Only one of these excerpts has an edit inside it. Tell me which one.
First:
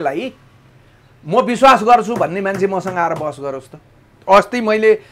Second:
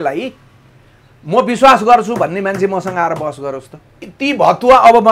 second; 1 cut; at 4.1 s

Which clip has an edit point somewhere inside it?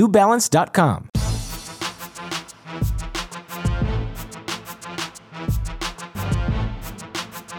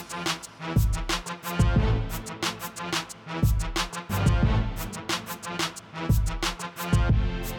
first; 1 cut; at 1.1 s

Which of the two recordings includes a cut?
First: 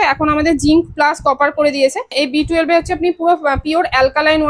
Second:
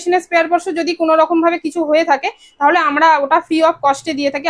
first; 1 cut; at 2.1 s

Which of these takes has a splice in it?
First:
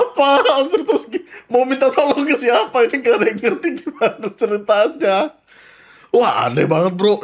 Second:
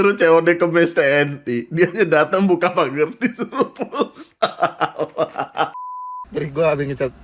second; 1 cut; at 6.0 s

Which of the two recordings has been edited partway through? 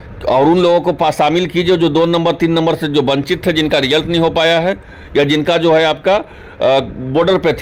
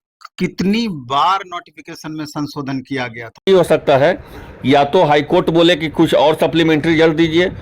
second; 1 cut; at 3.4 s

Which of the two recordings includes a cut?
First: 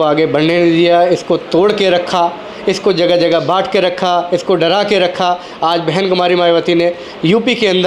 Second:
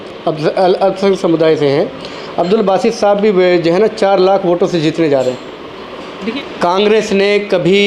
second; 1 cut; at 6.4 s

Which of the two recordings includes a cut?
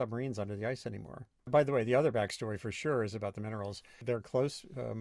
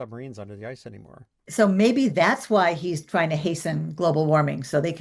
first; 2 cuts; at 1.5 s, 4.0 s

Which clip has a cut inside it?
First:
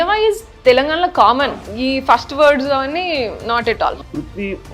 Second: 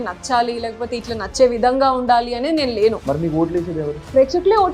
first; 2 cuts; at 1.4 s, 3.9 s

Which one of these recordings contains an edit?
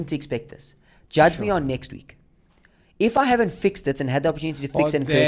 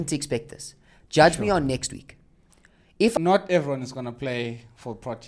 second; 1 cut; at 3.2 s

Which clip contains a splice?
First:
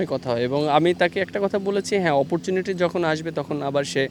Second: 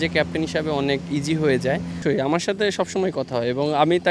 second; 1 cut; at 2.0 s

